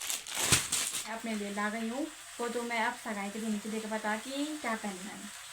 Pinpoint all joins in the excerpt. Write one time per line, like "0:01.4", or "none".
0:01.1